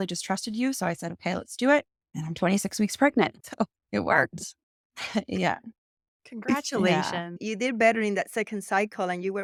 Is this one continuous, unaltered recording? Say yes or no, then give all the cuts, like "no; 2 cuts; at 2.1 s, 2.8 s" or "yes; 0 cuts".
yes; 0 cuts